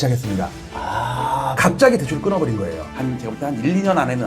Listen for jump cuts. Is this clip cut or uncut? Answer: cut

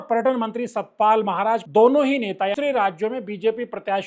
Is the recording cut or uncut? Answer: cut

